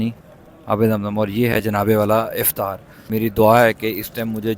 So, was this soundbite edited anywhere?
yes; 1 cut; at 3.1 s

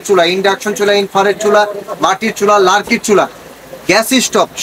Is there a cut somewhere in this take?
no; 0 cuts

